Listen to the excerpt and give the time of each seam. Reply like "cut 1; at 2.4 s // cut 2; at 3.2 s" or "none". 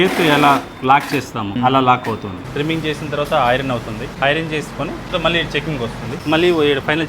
cut 1; at 1.5 s // cut 2; at 2.4 s // cut 3; at 4.1 s // cut 4; at 5.1 s // cut 5; at 6.2 s